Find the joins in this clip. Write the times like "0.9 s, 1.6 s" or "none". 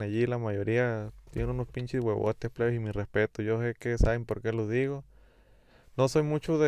none